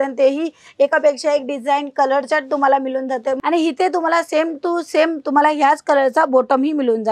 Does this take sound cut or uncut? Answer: cut